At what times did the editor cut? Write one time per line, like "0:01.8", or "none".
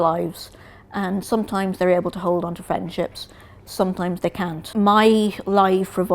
0:04.6